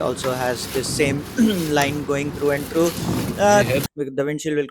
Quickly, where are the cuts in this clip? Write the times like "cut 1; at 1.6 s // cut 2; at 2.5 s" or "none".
cut 1; at 3.7 s